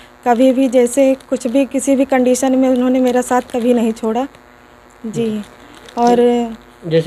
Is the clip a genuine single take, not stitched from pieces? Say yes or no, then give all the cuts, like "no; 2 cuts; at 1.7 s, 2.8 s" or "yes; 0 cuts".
yes; 0 cuts